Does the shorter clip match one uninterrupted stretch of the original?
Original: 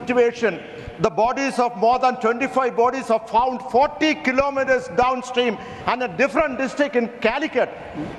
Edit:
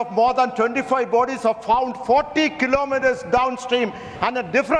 yes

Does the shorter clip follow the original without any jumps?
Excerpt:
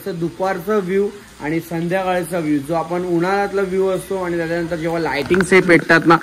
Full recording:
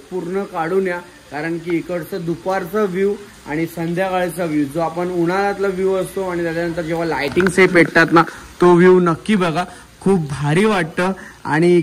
yes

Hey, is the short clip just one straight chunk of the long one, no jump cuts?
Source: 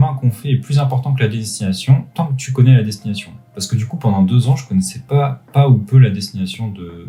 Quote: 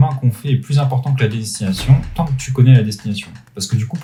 yes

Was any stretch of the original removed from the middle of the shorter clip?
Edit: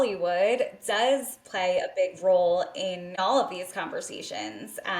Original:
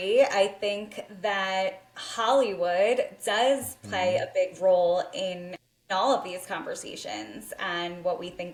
yes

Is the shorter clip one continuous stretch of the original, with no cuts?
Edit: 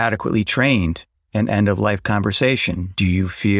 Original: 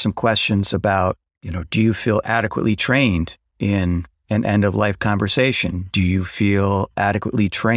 no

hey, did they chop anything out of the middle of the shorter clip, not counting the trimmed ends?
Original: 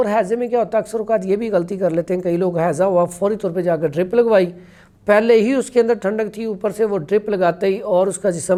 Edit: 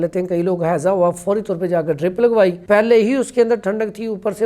yes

